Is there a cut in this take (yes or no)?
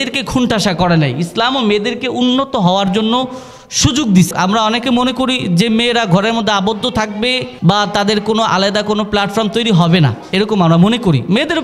yes